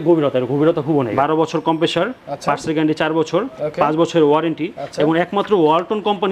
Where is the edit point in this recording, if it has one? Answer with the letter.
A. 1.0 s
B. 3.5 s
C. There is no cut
A